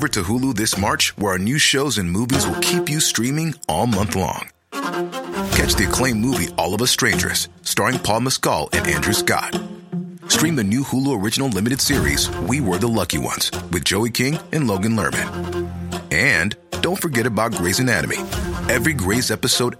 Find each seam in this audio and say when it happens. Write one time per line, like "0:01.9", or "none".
none

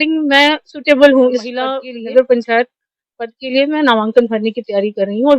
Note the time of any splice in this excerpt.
0:01.9

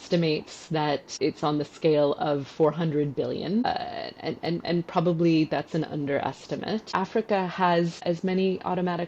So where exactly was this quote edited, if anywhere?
0:01.1
0:03.6
0:06.9
0:08.0

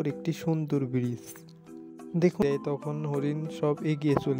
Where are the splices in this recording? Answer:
0:02.4

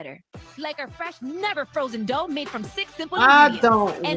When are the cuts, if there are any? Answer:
none

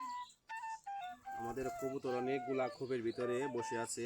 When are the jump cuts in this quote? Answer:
0:01.5

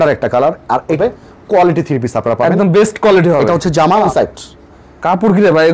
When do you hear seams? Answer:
0:01.0
0:04.1

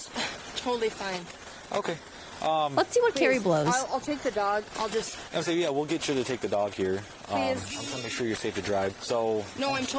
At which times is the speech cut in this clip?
none

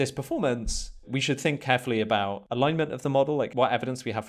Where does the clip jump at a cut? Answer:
0:01.1
0:02.4
0:03.5

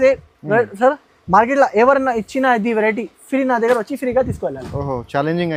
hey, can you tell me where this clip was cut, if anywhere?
none

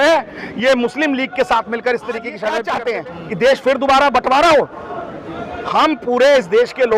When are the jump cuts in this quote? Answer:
0:02.7

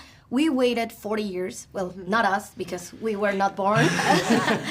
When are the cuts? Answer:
none

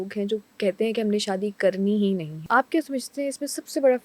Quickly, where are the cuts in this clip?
0:02.3

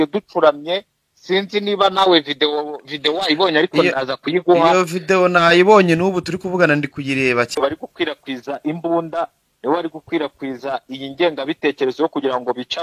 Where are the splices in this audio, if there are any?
0:07.5

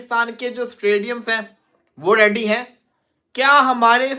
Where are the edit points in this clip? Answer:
none

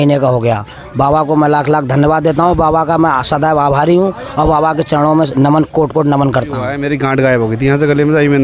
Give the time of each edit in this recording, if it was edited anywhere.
0:06.7

